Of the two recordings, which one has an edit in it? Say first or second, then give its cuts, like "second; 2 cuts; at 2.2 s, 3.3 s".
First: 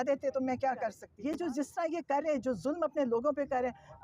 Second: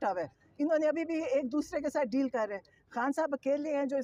first; 1 cut; at 1.1 s